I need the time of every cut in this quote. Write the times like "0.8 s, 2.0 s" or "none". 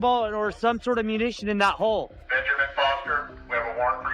2.2 s